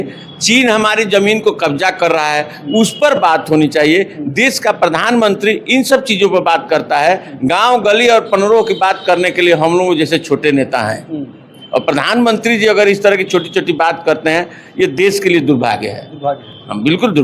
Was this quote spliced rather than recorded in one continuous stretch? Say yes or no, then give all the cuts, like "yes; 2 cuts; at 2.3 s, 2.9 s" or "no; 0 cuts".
no; 0 cuts